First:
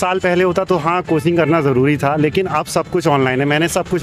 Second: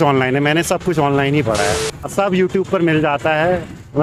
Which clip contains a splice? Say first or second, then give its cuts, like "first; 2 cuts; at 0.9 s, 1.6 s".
second; 1 cut; at 2.1 s